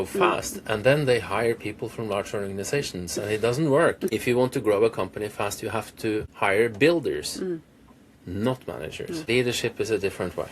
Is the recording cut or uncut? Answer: cut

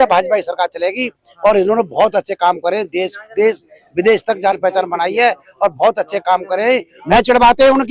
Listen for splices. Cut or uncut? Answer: cut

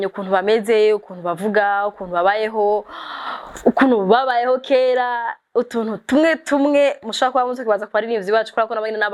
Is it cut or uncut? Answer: uncut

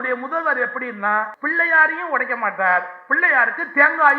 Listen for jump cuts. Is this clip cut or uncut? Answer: cut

